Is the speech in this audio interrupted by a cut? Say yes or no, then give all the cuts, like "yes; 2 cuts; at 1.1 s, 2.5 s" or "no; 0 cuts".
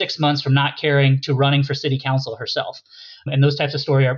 yes; 1 cut; at 3.2 s